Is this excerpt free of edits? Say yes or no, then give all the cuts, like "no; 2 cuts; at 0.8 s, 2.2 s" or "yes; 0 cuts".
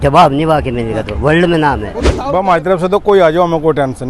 no; 1 cut; at 2.1 s